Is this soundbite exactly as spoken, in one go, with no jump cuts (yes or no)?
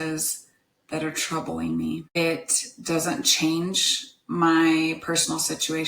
no